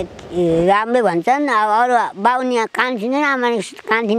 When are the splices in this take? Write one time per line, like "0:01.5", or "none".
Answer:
none

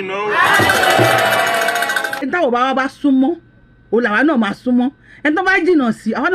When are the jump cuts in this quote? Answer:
0:02.1

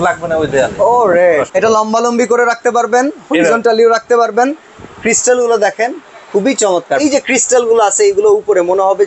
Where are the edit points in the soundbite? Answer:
0:01.5
0:07.0

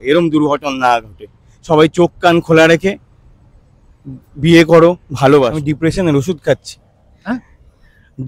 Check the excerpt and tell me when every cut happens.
0:05.6

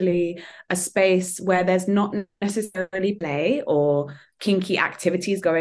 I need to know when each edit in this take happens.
none

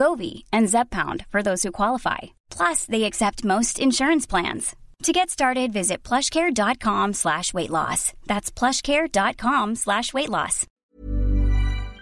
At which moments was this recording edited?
0:10.9

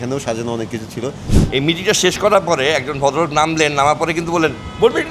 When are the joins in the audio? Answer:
0:01.3

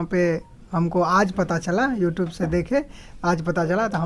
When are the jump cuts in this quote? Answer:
none

